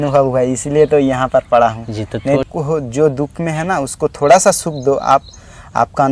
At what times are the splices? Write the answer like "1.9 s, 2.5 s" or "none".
2.4 s